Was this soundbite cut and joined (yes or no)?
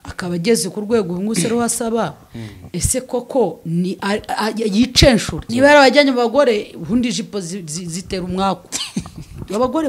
yes